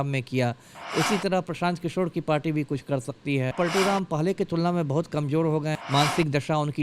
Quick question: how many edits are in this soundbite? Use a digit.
2